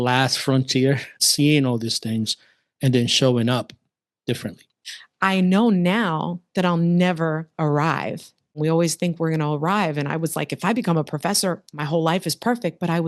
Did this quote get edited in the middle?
yes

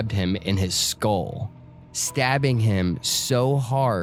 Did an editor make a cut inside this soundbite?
no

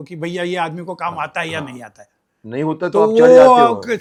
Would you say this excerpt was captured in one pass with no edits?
yes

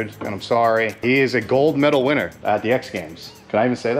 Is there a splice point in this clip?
yes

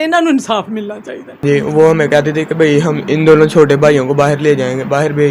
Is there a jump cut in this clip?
yes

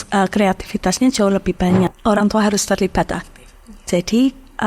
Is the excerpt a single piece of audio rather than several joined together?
no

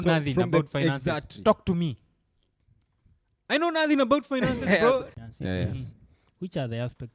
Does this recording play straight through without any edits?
no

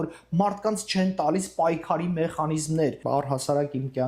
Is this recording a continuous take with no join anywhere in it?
no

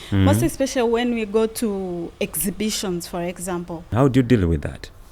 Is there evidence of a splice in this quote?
yes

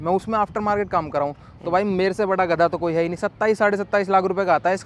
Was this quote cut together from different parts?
no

